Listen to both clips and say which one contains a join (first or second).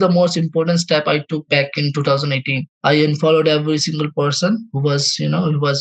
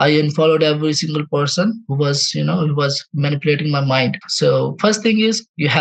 second